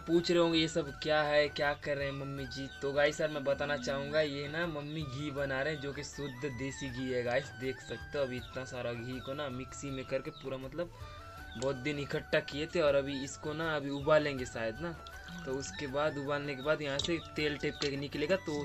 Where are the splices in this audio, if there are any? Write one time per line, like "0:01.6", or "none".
none